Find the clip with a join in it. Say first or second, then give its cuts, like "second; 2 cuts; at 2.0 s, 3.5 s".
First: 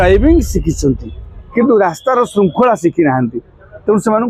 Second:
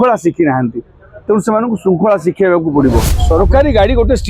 second; 1 cut; at 3.1 s